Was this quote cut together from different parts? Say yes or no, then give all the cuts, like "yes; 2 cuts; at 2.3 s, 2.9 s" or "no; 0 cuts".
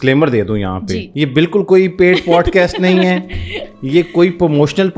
yes; 1 cut; at 1.1 s